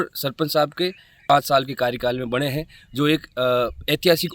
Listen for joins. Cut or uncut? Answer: cut